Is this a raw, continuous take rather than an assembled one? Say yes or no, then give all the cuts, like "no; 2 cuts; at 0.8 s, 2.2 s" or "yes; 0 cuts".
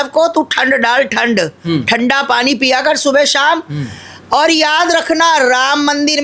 yes; 0 cuts